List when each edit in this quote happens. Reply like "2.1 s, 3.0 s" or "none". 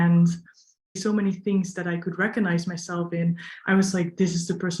1.0 s